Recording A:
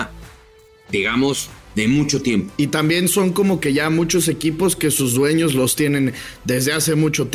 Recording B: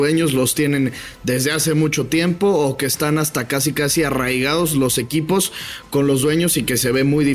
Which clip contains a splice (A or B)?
A